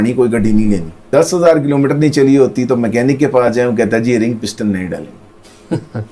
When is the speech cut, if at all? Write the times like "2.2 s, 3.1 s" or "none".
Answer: 1.0 s